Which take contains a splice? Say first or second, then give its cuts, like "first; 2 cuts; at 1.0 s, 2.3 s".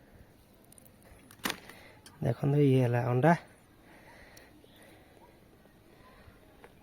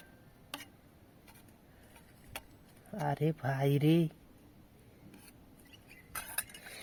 first; 1 cut; at 1.1 s